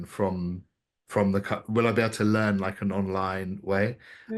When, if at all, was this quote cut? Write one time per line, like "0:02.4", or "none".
none